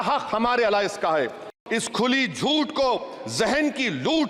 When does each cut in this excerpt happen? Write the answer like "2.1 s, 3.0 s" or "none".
1.5 s

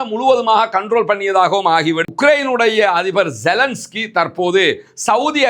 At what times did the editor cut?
2.1 s

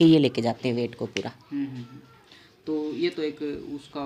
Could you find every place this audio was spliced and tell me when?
none

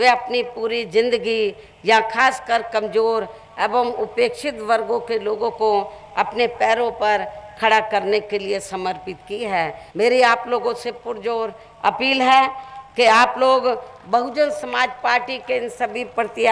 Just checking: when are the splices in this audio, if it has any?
9.8 s

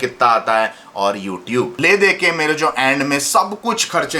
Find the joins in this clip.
1.8 s

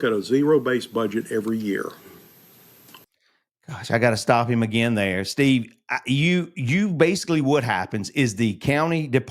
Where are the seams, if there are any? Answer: none

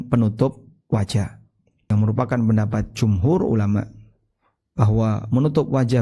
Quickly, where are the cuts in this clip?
1.9 s

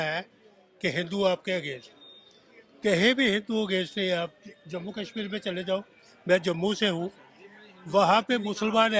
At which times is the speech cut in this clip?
none

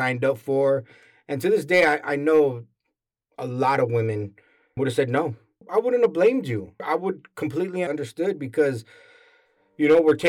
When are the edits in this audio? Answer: 5.7 s, 6.8 s, 7.9 s

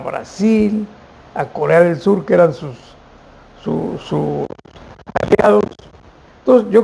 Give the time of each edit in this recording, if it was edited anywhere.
none

